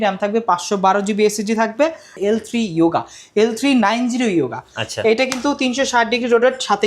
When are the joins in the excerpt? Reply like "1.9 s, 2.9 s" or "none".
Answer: 2.1 s